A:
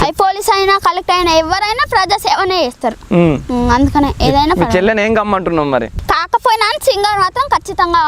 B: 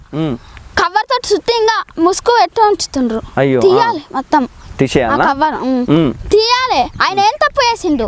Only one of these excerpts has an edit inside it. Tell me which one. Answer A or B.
A